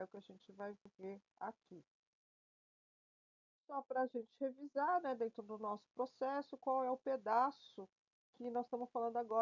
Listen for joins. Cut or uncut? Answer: uncut